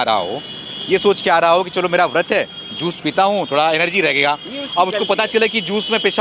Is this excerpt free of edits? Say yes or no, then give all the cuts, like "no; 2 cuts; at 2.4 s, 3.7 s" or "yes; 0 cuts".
yes; 0 cuts